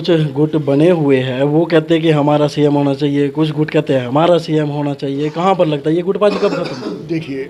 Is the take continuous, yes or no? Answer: yes